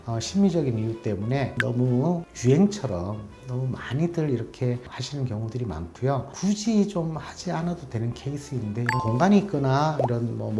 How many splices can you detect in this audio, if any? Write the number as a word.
one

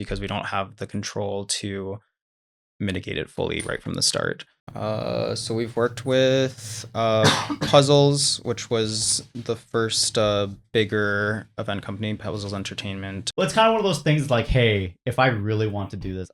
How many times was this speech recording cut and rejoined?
two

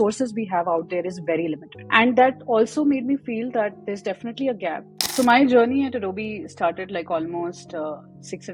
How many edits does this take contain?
two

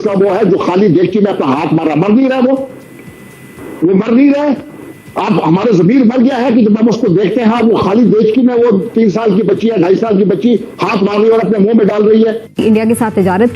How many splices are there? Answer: one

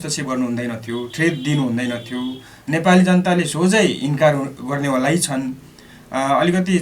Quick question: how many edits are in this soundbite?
zero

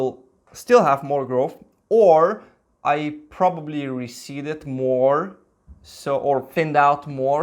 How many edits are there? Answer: zero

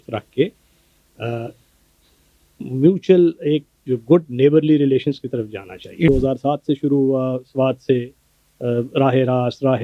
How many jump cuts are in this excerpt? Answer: one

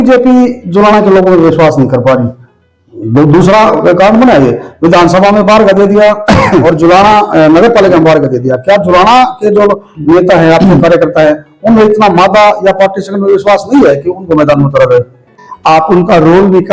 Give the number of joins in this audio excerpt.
one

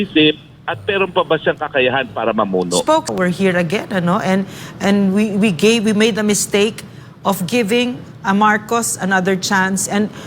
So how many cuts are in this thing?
one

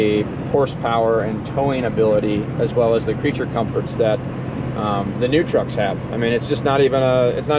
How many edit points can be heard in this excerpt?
zero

